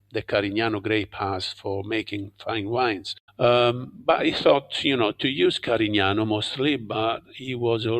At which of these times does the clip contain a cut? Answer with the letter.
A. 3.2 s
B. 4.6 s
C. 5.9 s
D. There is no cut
D